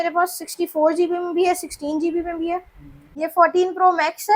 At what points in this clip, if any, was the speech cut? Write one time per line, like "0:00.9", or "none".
0:03.1